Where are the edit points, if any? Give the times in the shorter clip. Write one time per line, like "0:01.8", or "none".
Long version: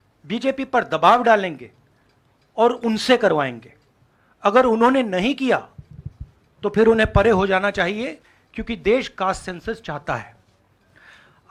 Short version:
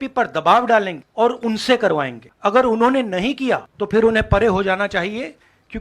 0:01.0
0:02.2
0:03.7